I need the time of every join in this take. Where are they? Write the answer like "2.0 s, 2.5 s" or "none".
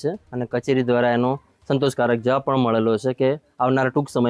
none